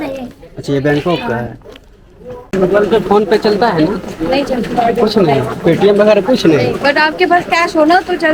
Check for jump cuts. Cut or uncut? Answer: cut